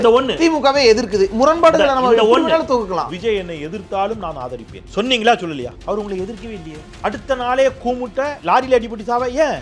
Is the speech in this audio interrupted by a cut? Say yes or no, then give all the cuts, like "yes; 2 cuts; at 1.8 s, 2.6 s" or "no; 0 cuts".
yes; 5 cuts; at 3.1 s, 4.8 s, 5.8 s, 6.8 s, 8.4 s